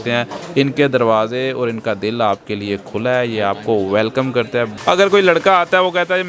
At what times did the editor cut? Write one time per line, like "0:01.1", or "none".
0:04.7